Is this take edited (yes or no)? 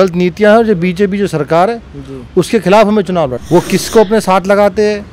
yes